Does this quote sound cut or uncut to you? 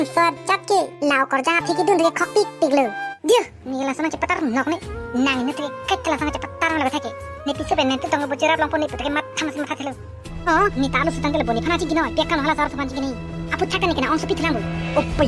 cut